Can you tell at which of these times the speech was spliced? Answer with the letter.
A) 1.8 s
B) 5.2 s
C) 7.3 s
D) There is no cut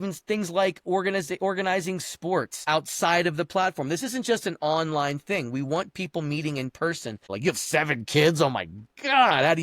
C